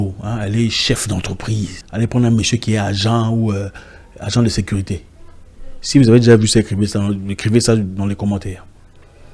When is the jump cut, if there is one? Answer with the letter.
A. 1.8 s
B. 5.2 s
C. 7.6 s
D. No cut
A